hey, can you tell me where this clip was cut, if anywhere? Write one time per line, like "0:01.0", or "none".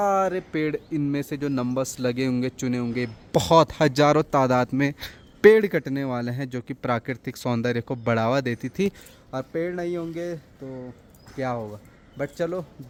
none